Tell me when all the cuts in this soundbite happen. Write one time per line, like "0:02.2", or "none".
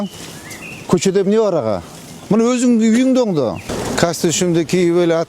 0:03.7